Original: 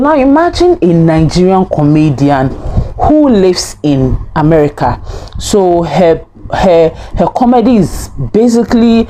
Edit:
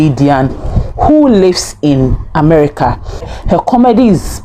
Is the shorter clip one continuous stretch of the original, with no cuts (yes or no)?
no